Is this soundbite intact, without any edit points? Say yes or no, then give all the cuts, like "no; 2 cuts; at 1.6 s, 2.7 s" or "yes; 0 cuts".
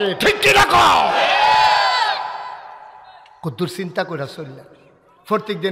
yes; 0 cuts